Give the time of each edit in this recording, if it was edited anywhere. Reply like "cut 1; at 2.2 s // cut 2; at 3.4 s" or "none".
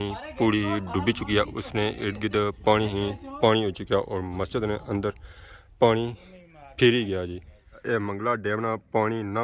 cut 1; at 7.8 s